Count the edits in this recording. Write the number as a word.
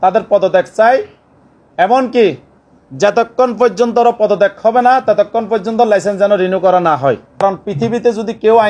one